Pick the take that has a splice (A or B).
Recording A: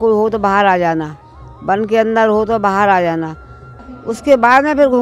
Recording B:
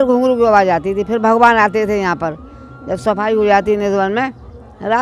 A